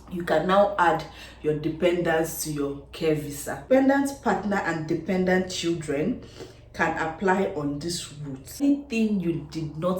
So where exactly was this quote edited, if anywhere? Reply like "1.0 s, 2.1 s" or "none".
3.7 s, 8.6 s

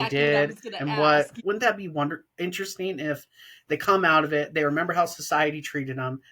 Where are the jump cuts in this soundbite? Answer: 1.4 s

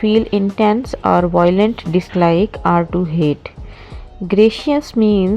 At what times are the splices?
0.9 s

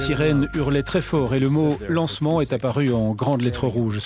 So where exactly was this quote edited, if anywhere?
none

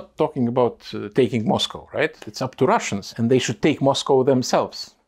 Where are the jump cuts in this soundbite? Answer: 3.0 s

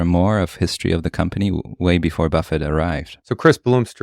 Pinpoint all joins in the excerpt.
3.1 s

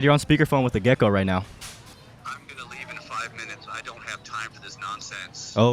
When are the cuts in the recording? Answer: 1.9 s

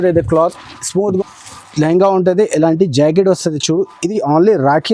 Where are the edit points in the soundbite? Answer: 1.2 s

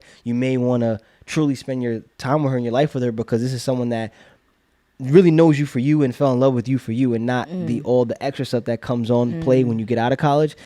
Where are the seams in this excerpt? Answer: none

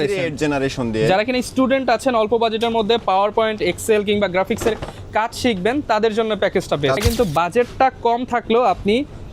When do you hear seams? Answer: 7.0 s

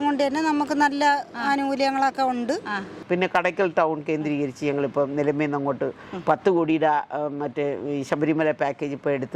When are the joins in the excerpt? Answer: 3.0 s

